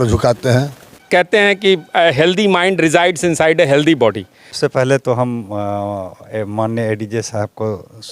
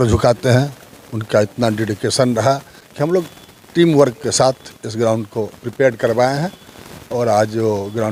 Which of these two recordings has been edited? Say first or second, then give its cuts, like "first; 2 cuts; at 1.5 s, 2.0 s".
first; 2 cuts; at 1.0 s, 4.4 s